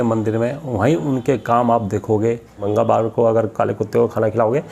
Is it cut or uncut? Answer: cut